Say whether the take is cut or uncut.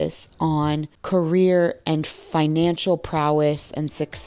cut